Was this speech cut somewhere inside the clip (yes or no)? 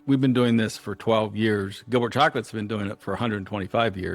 no